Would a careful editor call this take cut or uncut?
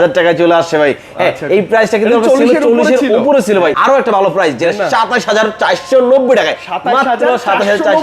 cut